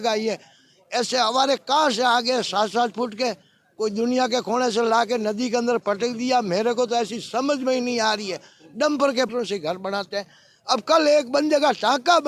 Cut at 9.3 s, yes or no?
yes